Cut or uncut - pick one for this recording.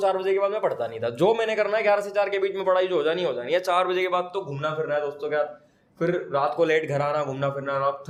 uncut